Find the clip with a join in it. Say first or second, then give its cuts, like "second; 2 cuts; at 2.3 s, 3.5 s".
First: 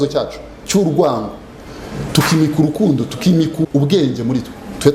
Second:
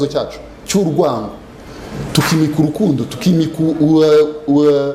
first; 1 cut; at 3.6 s